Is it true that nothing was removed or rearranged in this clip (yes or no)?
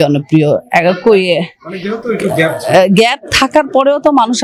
yes